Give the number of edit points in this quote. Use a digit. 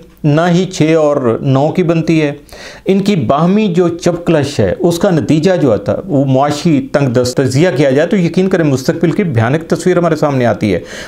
1